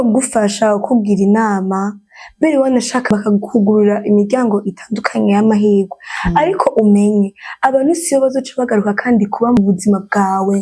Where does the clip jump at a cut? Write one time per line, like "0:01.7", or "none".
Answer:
0:03.1
0:09.6